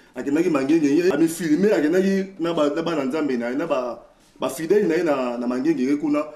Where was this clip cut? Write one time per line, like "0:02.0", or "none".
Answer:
0:01.1